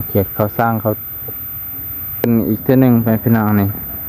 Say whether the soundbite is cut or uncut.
cut